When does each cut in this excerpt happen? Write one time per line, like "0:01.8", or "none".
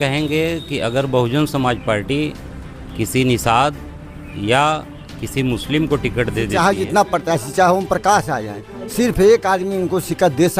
0:06.5